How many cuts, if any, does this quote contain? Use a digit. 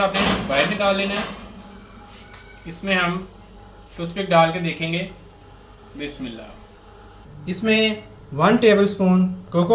1